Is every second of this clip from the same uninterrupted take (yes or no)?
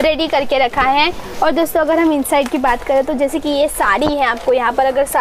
yes